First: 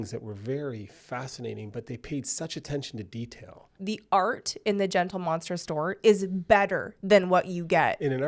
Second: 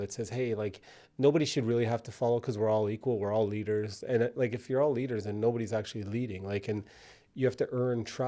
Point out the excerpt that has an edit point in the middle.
first; 1 cut; at 3.7 s

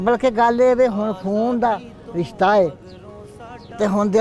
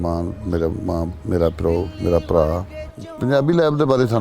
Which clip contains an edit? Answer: second; 1 cut; at 2.7 s

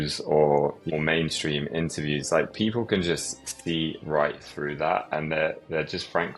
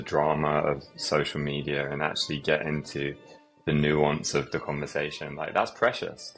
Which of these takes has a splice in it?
first; 1 cut; at 0.9 s

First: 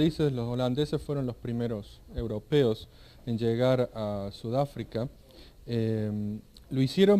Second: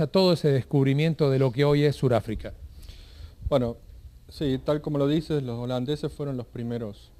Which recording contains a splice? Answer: first; 1 cut; at 4.8 s

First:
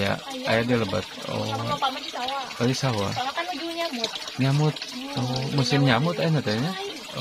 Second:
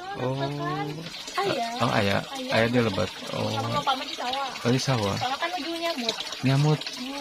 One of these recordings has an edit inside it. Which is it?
second; 1 cut; at 1.1 s

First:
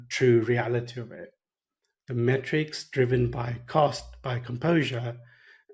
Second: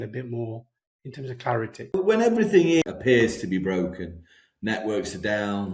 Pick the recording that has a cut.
second; 2 cuts; at 1.9 s, 2.8 s

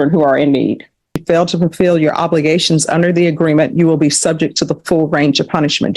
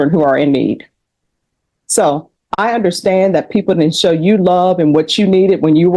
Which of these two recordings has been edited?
first; 1 cut; at 1.2 s

